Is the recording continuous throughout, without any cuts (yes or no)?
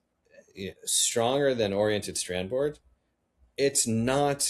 yes